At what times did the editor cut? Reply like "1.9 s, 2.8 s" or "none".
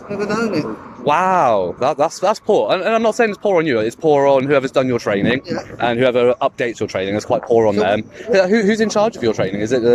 none